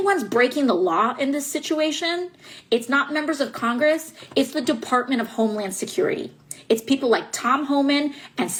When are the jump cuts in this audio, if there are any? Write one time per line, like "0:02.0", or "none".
none